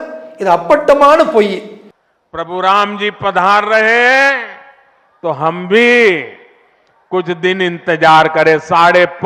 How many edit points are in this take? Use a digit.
0